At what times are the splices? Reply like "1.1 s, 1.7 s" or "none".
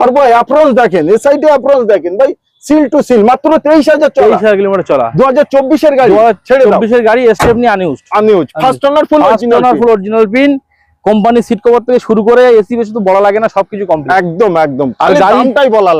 none